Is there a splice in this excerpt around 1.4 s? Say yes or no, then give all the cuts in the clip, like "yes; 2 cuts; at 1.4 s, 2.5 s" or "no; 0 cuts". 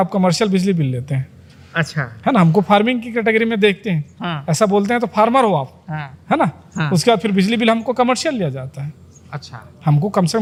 no; 0 cuts